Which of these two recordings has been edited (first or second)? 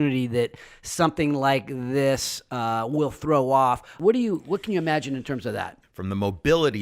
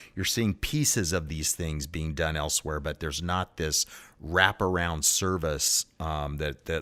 first